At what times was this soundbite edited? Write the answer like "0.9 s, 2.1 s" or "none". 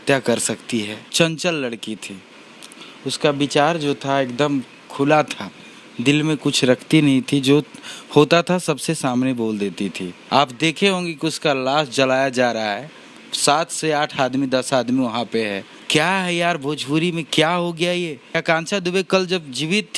1.0 s, 10.1 s, 15.7 s, 18.4 s